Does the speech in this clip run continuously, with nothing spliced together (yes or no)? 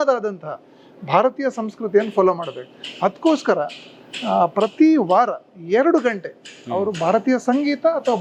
yes